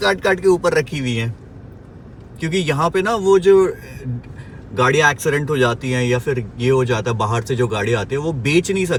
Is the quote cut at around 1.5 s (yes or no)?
no